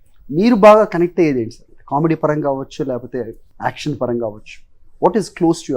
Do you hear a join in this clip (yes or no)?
yes